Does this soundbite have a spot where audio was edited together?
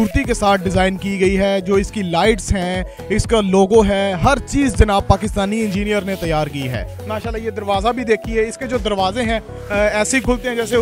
no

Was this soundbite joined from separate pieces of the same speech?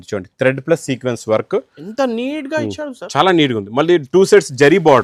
no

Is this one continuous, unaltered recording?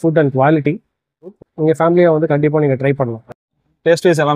no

